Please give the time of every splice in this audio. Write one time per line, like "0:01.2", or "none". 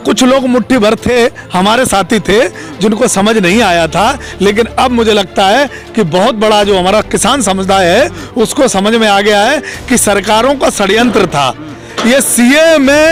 none

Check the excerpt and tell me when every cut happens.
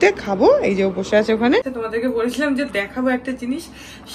0:01.8

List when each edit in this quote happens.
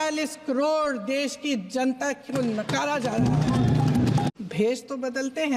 0:04.3

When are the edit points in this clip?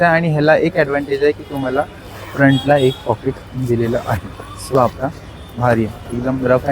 0:04.7

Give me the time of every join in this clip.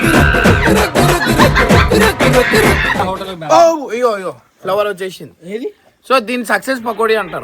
0:03.0

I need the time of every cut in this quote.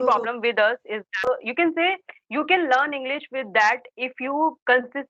0:01.1

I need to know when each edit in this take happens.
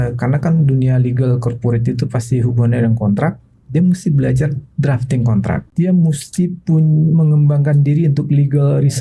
0:05.7

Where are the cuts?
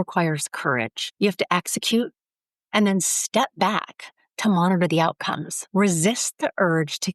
0:01.0
0:05.5

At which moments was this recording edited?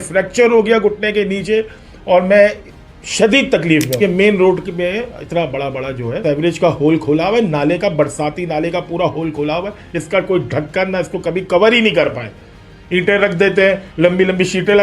0:04.0

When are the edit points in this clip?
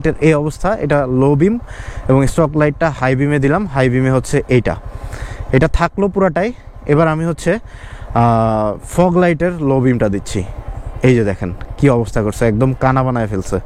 none

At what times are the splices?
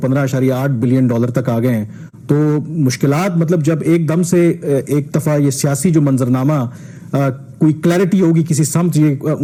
none

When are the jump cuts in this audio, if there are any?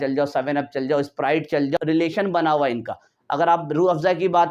0:01.8

